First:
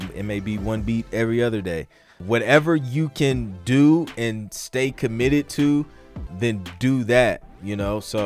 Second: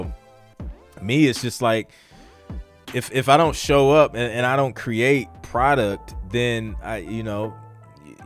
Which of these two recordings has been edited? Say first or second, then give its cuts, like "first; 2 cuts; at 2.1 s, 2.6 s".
first; 2 cuts; at 2.2 s, 6.2 s